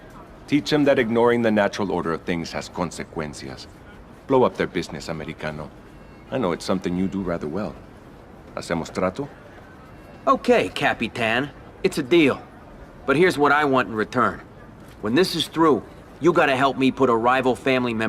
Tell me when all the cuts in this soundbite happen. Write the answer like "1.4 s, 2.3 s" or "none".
3.1 s